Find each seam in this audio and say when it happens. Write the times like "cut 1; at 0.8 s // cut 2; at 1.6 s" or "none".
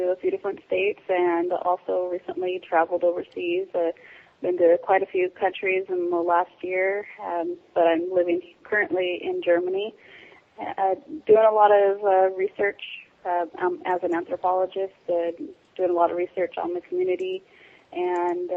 cut 1; at 13.0 s